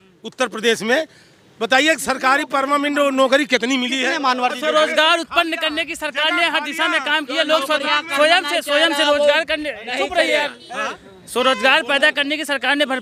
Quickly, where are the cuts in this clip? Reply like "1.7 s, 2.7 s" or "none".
none